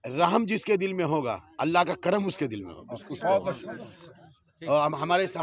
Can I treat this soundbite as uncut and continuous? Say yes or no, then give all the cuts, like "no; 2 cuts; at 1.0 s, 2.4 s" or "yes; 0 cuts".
yes; 0 cuts